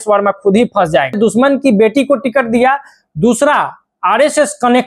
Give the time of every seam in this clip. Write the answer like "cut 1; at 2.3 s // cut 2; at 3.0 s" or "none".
cut 1; at 1.2 s